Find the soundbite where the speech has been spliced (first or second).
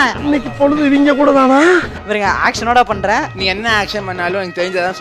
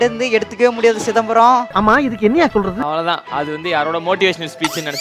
first